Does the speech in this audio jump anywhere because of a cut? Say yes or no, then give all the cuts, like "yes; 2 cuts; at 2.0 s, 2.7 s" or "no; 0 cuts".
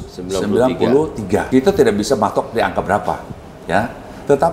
yes; 1 cut; at 1.5 s